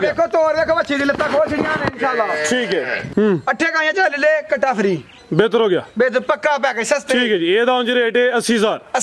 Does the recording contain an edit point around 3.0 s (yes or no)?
yes